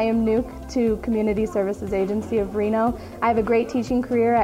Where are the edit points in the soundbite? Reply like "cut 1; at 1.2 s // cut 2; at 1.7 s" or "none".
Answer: none